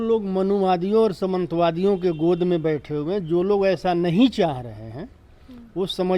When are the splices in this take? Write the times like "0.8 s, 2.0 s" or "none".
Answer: none